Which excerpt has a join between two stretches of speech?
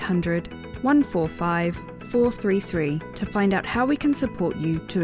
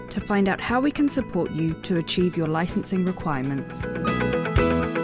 second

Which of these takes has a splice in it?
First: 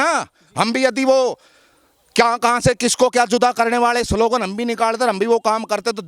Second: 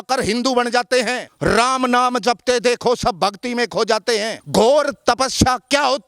second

